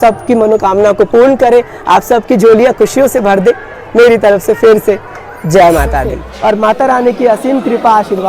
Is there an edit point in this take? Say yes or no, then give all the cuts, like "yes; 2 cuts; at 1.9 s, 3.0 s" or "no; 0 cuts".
yes; 1 cut; at 6.2 s